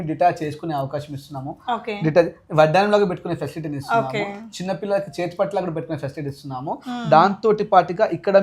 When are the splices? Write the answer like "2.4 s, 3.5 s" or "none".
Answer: none